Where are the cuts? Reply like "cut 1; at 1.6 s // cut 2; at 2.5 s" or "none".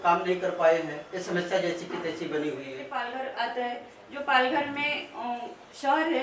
cut 1; at 2.8 s